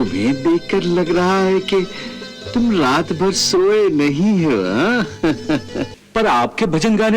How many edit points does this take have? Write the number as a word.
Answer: one